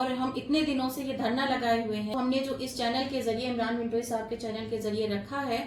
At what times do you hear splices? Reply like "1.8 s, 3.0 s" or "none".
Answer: 2.1 s